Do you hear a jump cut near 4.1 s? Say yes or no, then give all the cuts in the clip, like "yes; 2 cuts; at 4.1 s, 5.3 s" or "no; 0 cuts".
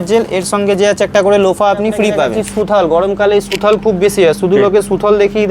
no; 1 cut; at 2.4 s